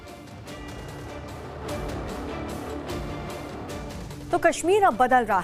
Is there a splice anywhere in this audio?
no; 0 cuts

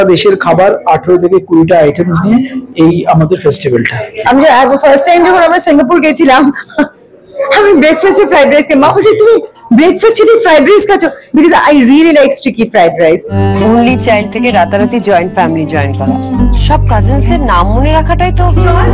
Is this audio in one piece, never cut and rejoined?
no; 2 cuts; at 3.9 s, 13.3 s

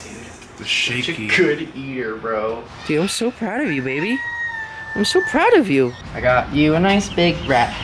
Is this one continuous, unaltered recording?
no; 2 cuts; at 2.7 s, 6.0 s

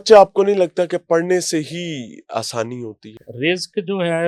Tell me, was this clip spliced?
yes; 1 cut; at 3.2 s

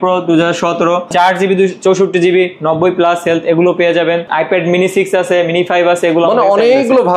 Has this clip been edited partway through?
yes; 2 cuts; at 1.1 s, 4.3 s

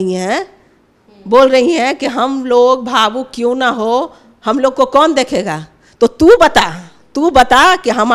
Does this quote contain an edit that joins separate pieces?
no; 0 cuts

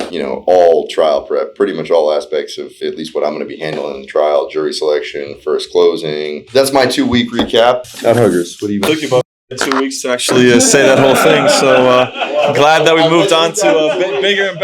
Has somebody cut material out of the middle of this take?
yes; 1 cut; at 6.4 s

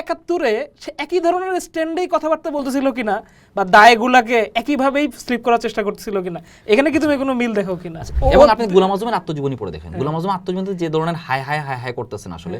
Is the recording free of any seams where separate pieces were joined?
no; 1 cut; at 8.1 s

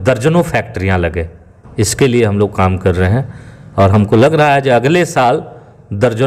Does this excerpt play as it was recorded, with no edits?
yes; 0 cuts

